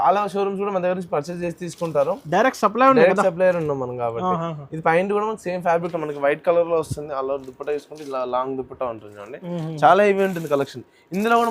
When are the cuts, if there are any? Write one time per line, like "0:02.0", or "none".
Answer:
0:05.9